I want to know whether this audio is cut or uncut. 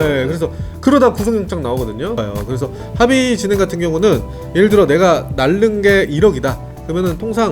cut